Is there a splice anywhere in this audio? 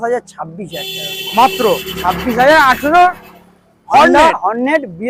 no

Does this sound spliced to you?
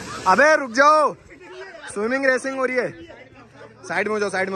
no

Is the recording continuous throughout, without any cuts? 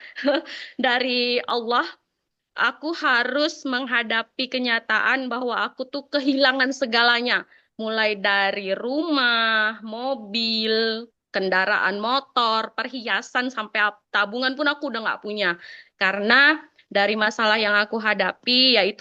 yes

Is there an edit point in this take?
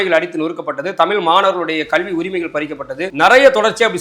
yes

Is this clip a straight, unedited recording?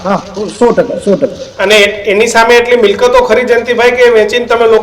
yes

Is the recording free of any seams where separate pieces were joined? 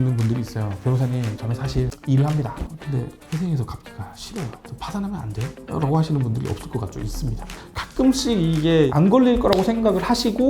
no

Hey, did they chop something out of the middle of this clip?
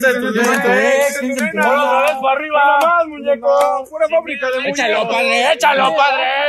no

